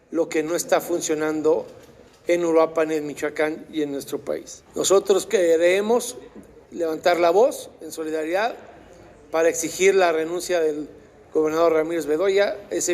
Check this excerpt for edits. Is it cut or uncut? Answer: cut